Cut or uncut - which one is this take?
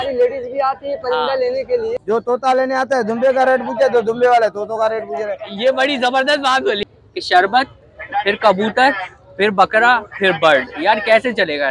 cut